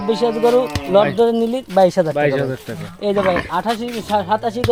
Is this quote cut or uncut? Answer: uncut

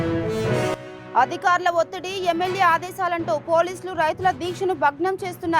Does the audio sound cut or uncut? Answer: cut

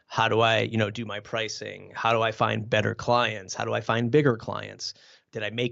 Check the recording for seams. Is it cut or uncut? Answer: uncut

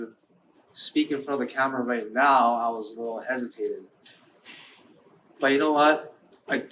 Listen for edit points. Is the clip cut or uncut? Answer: uncut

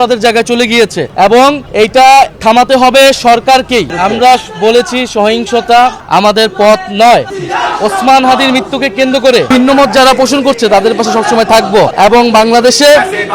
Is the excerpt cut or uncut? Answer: cut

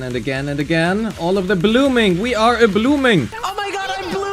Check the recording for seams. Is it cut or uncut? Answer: cut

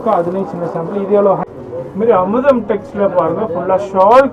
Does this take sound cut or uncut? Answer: cut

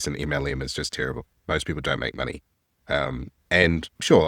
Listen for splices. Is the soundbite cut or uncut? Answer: uncut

